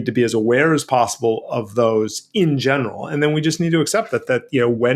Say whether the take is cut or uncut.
uncut